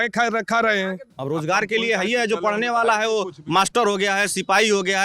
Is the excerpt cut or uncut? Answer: cut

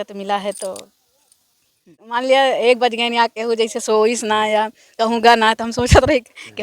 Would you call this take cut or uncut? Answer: cut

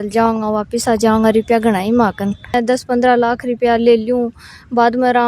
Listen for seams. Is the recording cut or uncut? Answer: cut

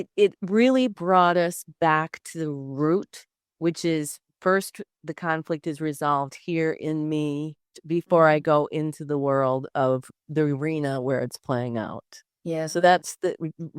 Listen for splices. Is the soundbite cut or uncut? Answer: cut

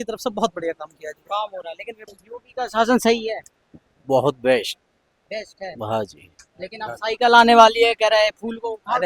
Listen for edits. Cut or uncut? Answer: cut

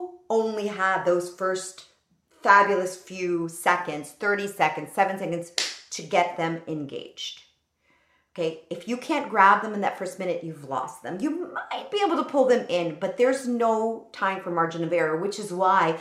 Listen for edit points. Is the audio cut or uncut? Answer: uncut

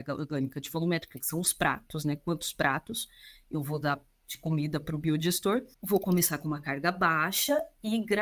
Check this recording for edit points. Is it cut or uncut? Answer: uncut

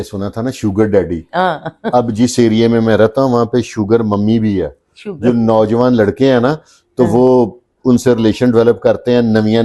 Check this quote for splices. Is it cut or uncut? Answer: uncut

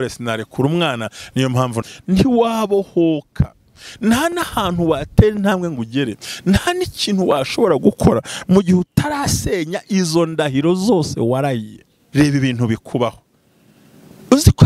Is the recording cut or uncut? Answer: cut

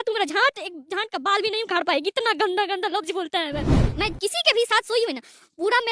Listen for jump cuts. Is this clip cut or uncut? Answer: cut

